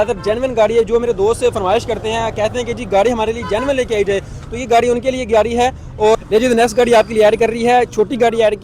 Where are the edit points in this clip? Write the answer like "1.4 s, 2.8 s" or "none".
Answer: 6.1 s